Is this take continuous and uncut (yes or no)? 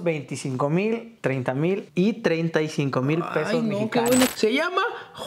no